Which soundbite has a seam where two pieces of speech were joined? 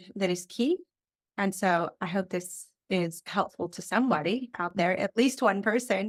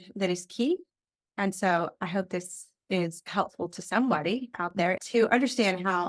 second; 1 cut; at 5.0 s

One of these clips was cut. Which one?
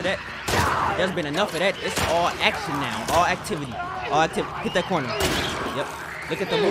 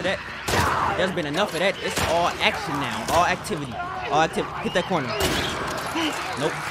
first; 1 cut; at 5.7 s

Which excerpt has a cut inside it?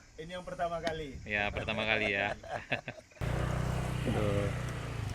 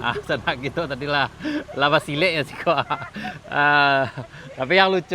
first; 1 cut; at 3.2 s

